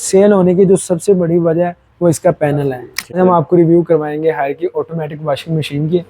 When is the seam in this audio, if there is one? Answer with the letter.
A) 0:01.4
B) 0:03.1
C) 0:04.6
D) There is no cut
B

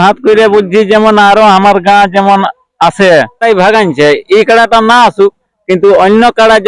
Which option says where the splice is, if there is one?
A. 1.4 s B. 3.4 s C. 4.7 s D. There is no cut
B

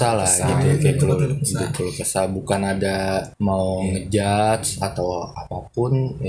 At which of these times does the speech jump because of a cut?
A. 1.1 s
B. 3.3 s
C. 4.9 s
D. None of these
B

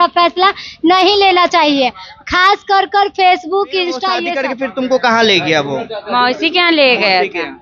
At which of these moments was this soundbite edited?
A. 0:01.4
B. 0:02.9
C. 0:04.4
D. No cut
C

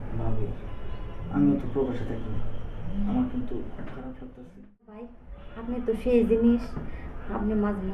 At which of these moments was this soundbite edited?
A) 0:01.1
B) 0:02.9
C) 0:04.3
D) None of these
C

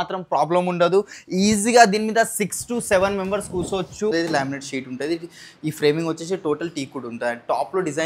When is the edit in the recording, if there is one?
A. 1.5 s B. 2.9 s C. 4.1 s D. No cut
C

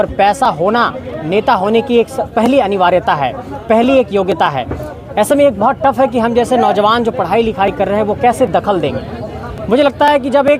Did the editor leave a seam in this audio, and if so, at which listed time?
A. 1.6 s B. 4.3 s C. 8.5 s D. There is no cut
D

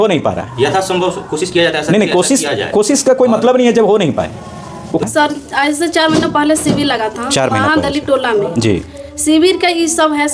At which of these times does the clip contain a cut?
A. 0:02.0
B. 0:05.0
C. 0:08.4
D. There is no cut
B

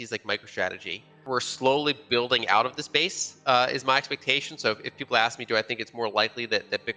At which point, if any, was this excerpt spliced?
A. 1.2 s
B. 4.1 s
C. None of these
A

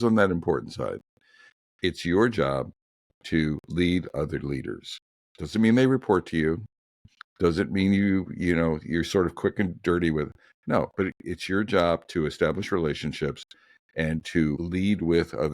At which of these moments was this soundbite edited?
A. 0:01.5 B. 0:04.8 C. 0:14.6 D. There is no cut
C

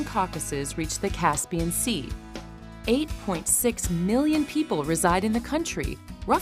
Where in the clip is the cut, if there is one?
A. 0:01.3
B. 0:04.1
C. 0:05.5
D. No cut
C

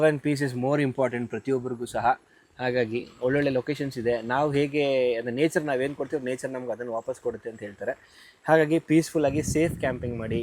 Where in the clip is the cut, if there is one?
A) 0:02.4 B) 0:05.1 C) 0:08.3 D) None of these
D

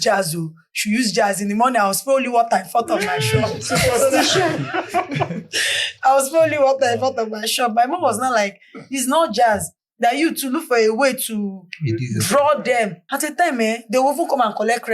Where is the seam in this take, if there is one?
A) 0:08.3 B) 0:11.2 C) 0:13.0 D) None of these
C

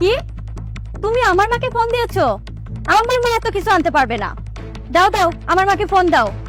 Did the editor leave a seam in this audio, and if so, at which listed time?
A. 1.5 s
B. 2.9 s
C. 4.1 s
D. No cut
D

